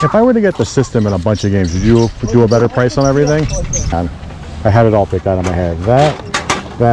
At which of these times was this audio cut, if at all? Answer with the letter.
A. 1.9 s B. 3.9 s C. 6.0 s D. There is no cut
B